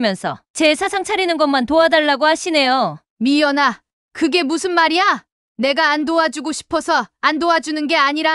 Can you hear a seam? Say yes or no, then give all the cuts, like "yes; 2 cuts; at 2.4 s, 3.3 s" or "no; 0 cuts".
yes; 1 cut; at 3.0 s